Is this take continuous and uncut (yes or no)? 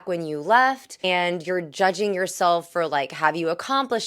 no